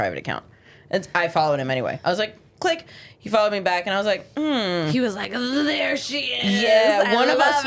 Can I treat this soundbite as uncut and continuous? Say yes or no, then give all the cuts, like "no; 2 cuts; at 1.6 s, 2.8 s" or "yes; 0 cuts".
yes; 0 cuts